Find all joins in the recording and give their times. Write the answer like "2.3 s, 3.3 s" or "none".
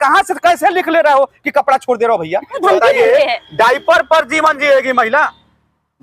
2.6 s